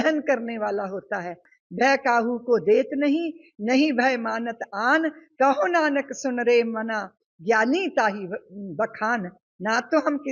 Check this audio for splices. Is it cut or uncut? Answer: cut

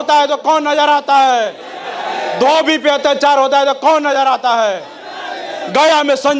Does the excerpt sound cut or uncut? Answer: uncut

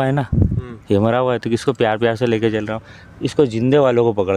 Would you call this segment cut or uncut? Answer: uncut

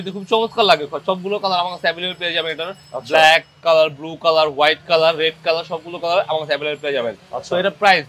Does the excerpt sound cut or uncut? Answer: uncut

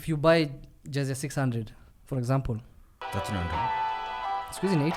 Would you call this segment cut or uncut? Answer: uncut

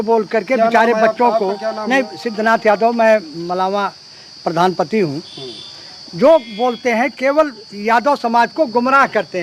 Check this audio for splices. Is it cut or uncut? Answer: uncut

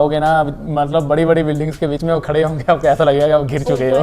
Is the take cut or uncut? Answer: uncut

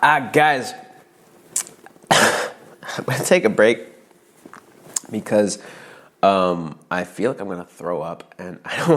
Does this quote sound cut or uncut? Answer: uncut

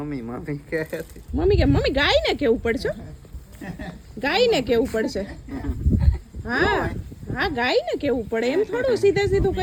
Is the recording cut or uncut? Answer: uncut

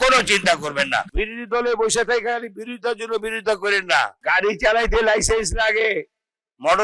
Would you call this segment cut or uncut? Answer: cut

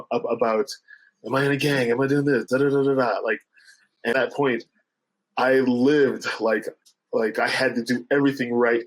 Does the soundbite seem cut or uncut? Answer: cut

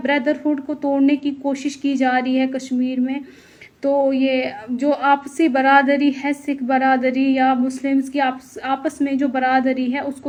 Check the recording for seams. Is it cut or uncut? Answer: uncut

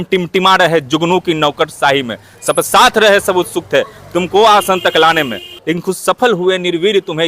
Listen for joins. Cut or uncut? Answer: cut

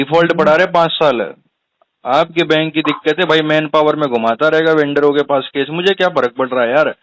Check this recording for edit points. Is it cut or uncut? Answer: uncut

